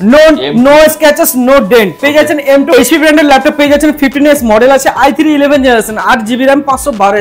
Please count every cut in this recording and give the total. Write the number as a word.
one